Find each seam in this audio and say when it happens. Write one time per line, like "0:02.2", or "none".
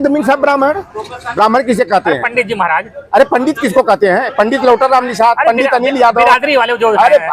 none